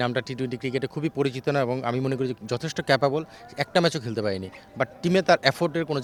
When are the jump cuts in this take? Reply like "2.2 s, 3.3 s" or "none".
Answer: none